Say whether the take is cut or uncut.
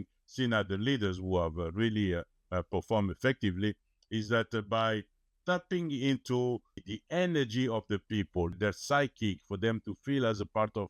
cut